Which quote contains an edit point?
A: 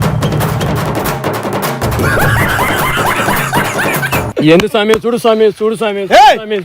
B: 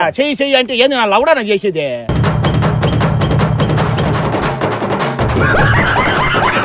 A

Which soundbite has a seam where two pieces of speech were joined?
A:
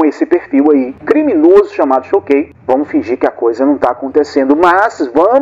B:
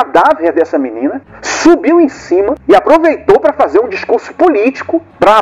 A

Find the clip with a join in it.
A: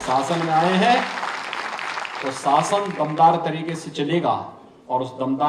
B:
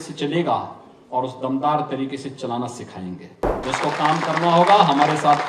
B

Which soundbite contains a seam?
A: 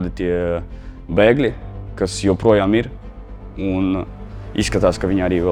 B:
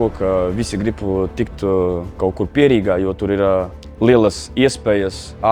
B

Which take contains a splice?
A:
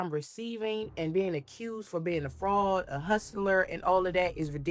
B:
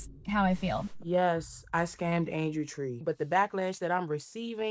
B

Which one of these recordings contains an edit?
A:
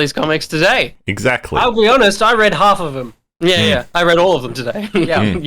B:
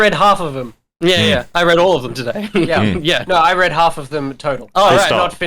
A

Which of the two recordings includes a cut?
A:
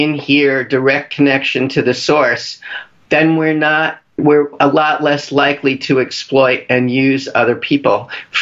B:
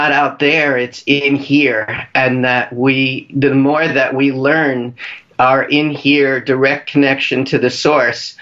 A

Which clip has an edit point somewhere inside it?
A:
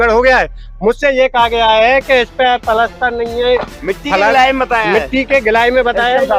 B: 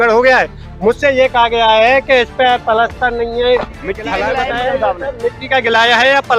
B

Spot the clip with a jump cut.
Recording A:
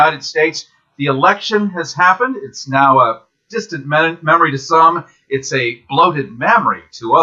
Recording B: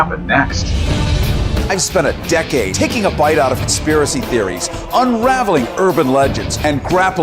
B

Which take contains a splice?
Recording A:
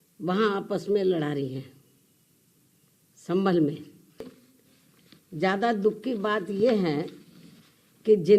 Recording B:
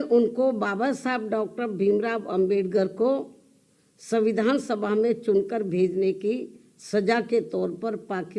A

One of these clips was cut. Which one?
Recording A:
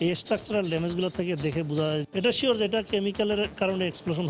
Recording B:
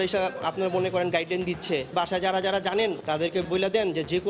B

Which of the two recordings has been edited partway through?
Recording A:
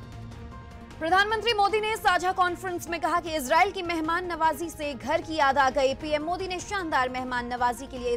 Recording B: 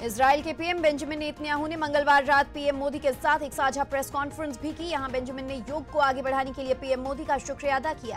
A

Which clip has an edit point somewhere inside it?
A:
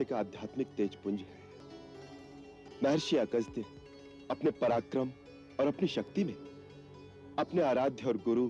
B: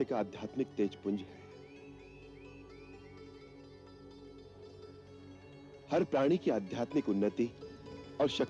A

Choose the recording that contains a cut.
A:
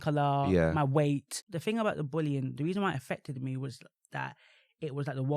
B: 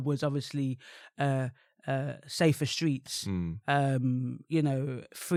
A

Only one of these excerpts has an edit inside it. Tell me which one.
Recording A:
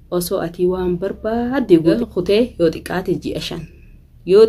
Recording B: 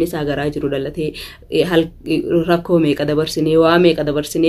A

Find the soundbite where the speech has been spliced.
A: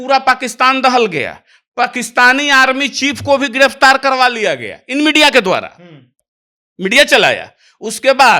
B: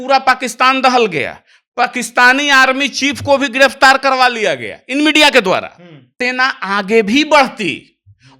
B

